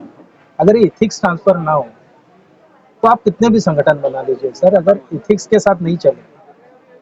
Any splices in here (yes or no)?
no